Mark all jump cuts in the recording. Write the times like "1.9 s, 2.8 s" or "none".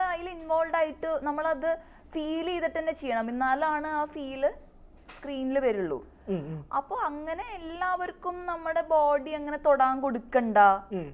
none